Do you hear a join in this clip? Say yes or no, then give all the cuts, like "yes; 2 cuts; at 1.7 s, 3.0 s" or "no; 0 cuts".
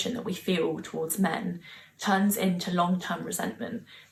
no; 0 cuts